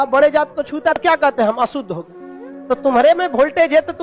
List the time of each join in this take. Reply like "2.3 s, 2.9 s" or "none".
1.0 s